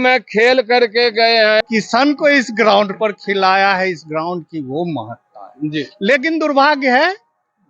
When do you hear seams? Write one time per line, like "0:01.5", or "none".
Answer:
0:01.6